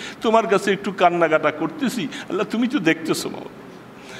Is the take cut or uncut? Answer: uncut